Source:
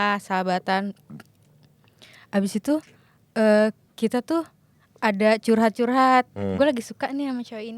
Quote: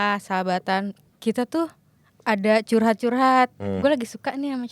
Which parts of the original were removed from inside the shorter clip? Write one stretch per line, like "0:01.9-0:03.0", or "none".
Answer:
0:01.1-0:03.9